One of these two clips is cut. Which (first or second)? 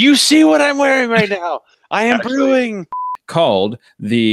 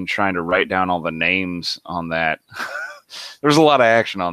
first